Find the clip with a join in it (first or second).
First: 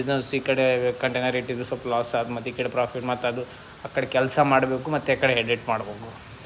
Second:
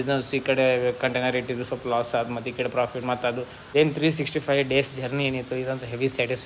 second